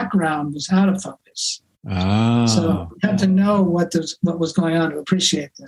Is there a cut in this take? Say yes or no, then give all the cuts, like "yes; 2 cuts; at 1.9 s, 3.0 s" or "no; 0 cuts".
no; 0 cuts